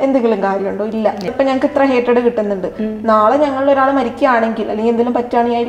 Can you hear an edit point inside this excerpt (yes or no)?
yes